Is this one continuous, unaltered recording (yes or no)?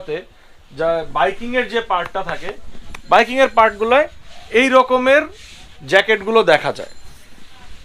yes